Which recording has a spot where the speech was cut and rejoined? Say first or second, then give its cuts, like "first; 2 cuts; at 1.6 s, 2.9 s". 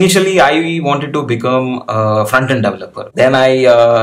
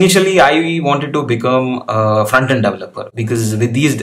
first; 1 cut; at 3.1 s